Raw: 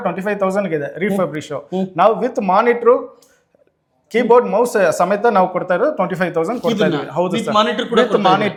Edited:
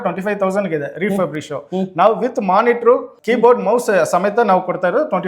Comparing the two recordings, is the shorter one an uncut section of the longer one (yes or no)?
no